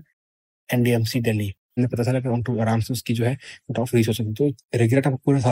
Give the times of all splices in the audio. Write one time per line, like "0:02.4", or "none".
0:01.8